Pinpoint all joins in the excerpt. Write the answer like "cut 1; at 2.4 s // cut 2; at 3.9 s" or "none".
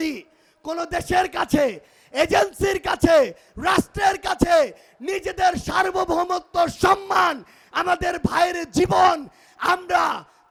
none